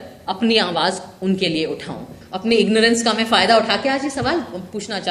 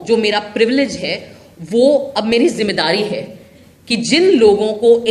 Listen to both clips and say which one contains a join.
first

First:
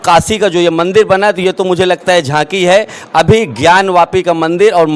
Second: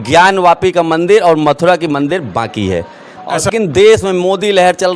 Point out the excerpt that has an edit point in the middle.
second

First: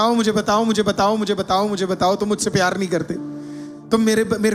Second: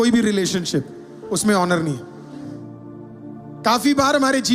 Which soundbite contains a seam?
second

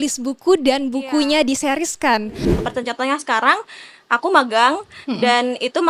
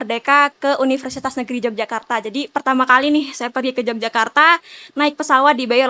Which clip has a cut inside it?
first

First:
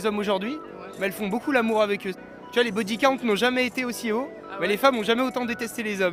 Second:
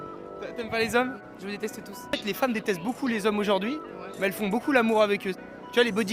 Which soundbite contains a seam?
second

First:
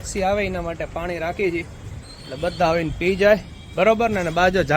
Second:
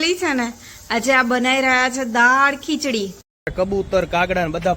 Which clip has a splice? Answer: second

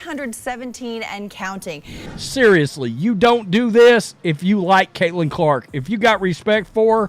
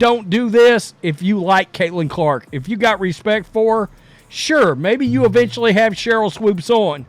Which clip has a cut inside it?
first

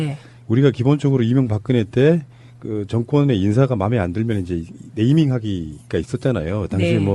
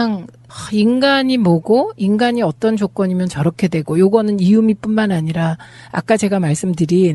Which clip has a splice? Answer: second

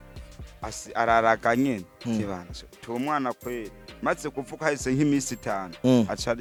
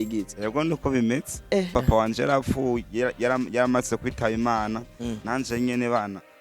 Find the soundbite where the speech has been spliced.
second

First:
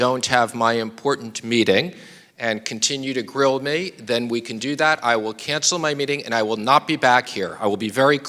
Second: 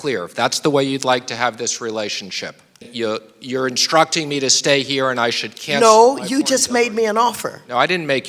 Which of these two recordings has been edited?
second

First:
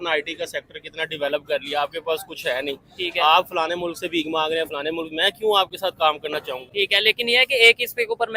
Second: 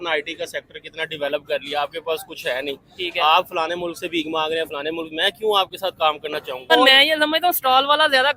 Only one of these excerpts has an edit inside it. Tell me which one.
second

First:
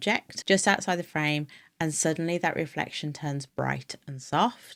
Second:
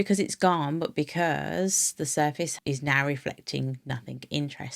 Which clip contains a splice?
second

